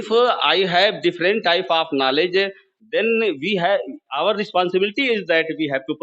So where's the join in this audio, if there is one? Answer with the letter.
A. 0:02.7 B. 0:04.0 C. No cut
C